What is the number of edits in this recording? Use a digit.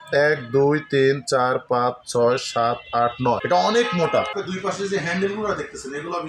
1